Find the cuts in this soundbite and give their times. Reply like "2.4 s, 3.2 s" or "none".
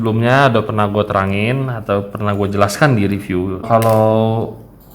3.7 s